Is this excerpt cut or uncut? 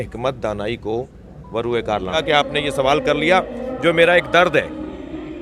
cut